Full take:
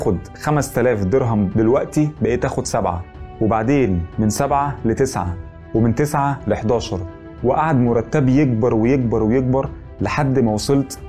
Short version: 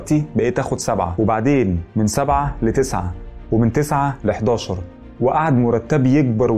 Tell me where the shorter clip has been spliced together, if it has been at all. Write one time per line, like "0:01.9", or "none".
0:01.1